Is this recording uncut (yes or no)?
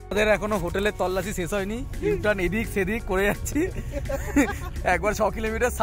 yes